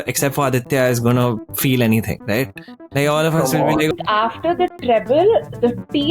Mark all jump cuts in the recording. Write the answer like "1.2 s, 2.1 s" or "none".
3.9 s